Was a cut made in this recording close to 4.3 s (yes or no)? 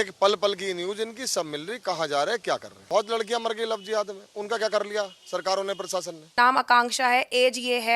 no